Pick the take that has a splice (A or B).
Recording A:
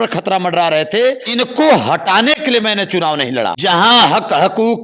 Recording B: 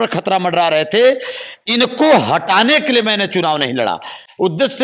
A